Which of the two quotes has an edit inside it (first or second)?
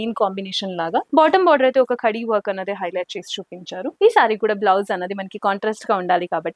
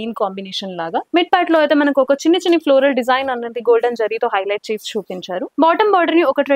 first